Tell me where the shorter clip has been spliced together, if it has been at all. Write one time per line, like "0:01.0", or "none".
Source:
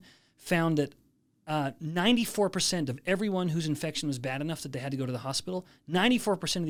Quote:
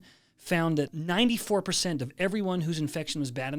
0:01.0